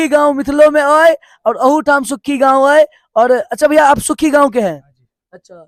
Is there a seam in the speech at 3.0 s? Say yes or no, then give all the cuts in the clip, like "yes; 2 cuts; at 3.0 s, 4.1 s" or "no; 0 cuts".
no; 0 cuts